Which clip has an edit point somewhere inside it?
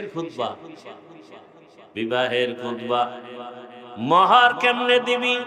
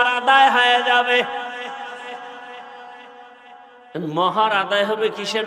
second; 1 cut; at 3.3 s

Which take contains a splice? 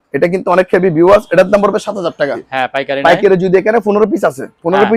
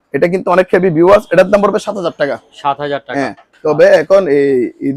first; 1 cut; at 2.4 s

